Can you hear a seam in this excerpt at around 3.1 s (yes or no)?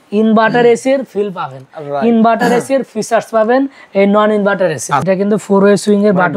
no